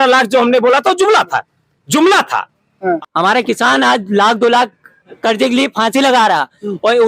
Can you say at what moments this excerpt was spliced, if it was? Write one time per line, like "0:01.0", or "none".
0:03.0